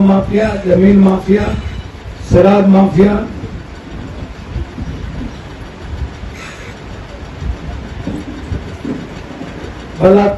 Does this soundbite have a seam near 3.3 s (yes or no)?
no